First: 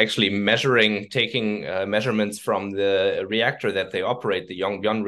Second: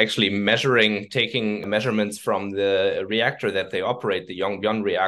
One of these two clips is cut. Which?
second; 1 cut; at 1.7 s

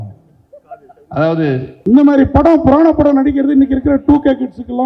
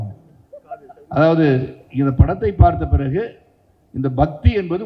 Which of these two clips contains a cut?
first; 1 cut; at 1.7 s

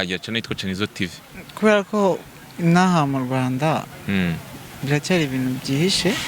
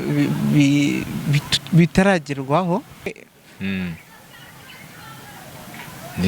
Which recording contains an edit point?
second; 1 cut; at 3.1 s

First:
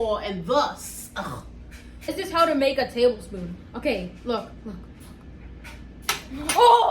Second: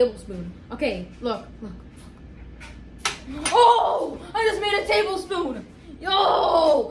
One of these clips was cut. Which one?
first; 1 cut; at 2.1 s

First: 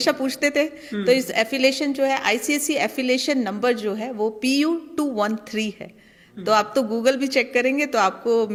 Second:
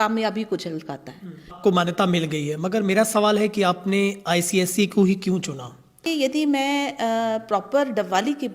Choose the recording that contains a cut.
second; 2 cuts; at 1.6 s, 6.1 s

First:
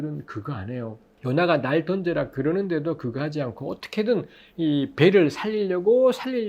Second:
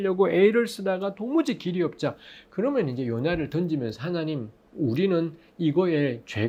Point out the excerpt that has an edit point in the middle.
first; 1 cut; at 1.1 s

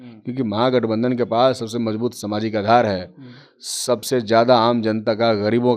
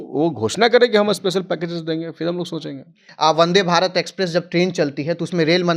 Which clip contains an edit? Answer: second; 1 cut; at 3.0 s

